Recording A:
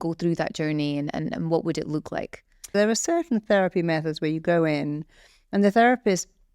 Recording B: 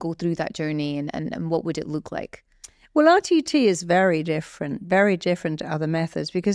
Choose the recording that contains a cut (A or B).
A